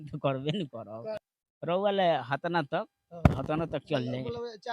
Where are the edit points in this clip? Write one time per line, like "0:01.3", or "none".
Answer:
0:01.3